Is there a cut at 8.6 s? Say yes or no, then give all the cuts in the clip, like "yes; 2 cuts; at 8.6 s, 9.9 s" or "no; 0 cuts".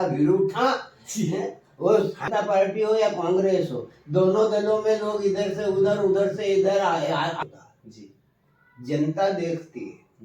no; 2 cuts; at 2.3 s, 7.4 s